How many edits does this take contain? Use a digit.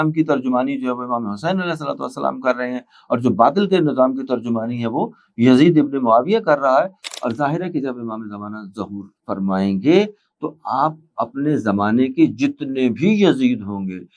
1